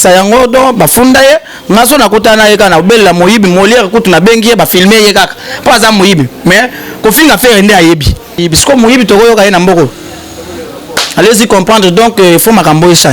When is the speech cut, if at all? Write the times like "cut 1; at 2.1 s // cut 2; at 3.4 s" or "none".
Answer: cut 1; at 8.5 s

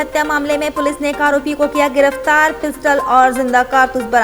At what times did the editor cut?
none

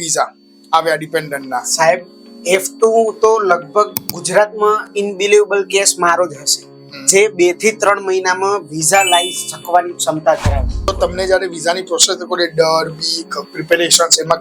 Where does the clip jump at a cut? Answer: cut 1; at 10.9 s

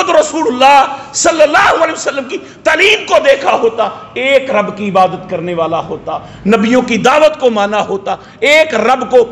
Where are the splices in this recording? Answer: none

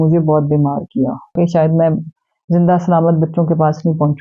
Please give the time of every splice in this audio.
cut 1; at 1.3 s

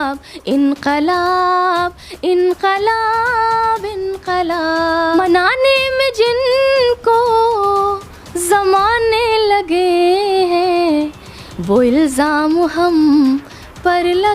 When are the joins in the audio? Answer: cut 1; at 5.2 s

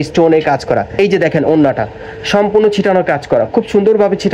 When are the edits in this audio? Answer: cut 1; at 0.9 s

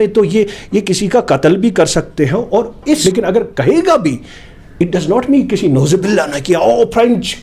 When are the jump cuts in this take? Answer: cut 1; at 3.0 s

